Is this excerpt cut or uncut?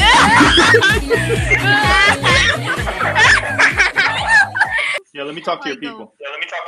cut